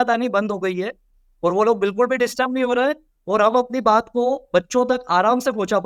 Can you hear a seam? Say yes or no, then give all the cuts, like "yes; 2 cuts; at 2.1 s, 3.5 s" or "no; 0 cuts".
no; 0 cuts